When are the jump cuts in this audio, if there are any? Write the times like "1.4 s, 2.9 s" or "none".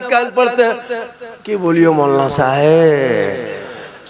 none